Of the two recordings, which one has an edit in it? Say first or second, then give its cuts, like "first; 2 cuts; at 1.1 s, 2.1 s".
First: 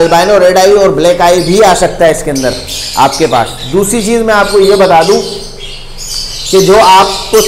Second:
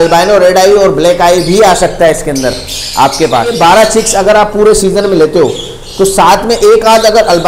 second; 1 cut; at 3.5 s